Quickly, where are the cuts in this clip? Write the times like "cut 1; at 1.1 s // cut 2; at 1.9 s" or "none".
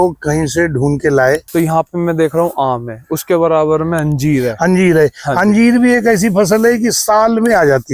cut 1; at 1.4 s